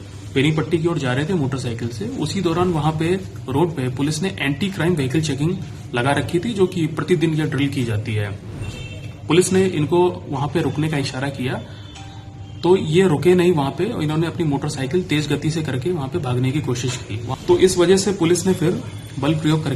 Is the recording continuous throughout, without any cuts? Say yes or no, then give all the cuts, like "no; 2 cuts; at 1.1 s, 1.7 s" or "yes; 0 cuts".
no; 1 cut; at 17.1 s